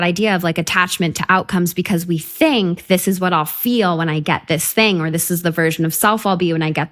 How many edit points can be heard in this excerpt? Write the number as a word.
zero